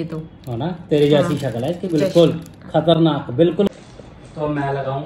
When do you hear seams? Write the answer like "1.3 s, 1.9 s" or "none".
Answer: none